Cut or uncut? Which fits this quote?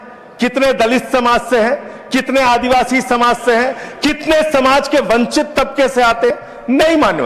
uncut